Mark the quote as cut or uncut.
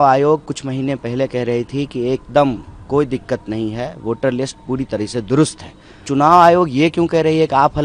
cut